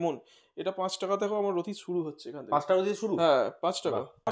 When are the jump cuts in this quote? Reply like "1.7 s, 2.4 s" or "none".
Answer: none